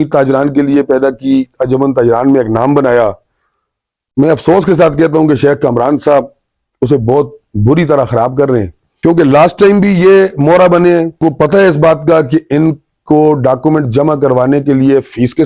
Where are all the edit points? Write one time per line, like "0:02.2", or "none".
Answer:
0:08.8
0:11.2